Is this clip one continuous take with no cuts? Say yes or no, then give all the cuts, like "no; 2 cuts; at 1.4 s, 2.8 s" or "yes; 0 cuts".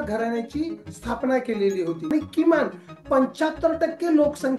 no; 1 cut; at 2.1 s